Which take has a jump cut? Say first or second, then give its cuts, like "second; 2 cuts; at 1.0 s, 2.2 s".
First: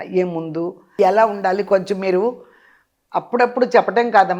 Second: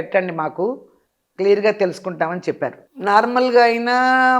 second; 1 cut; at 2.8 s